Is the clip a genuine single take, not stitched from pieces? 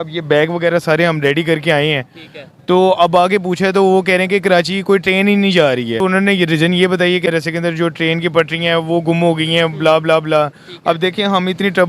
no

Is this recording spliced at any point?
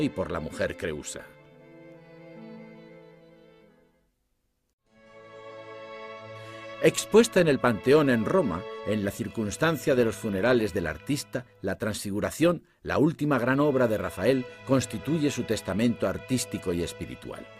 yes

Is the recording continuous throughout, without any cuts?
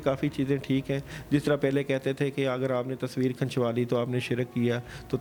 yes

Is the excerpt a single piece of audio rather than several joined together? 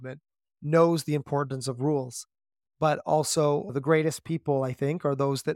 no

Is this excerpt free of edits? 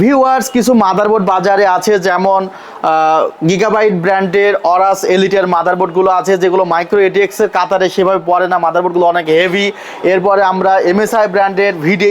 yes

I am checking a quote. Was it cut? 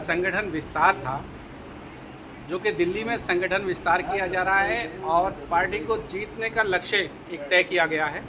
no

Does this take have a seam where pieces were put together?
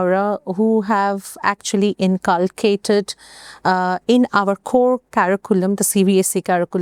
no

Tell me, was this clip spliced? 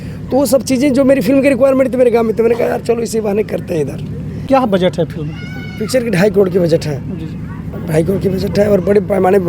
yes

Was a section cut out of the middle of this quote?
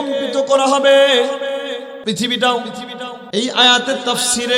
yes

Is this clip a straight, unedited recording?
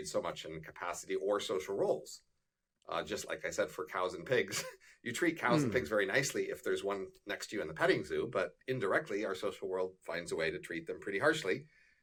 yes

